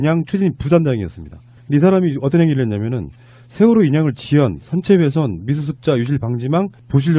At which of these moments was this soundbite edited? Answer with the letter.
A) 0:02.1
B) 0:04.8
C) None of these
C